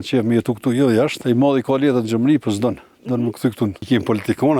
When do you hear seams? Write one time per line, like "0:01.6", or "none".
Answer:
0:01.2
0:03.8